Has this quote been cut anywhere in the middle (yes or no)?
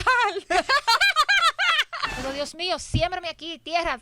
yes